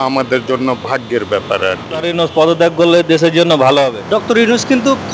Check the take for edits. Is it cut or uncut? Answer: cut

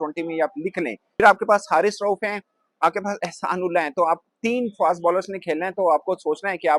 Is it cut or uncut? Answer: cut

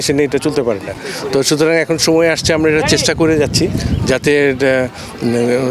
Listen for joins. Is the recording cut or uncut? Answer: uncut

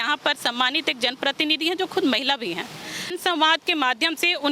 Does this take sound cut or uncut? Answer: cut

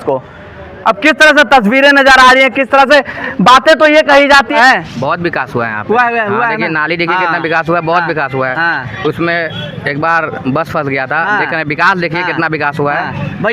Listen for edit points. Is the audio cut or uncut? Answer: cut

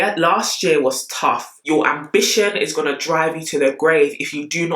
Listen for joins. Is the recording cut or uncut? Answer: cut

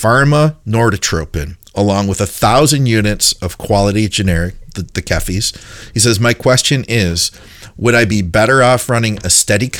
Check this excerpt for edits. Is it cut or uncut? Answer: uncut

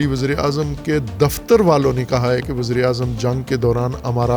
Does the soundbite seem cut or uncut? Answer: uncut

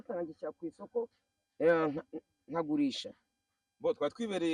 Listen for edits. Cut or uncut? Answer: uncut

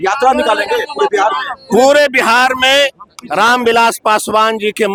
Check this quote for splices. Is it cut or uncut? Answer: uncut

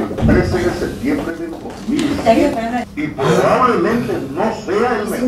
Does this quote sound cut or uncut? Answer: cut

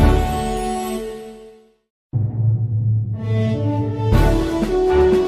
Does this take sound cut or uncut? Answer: uncut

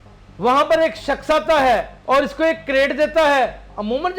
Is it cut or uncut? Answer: cut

